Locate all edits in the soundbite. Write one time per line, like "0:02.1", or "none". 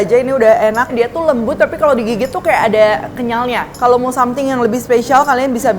0:00.9
0:03.7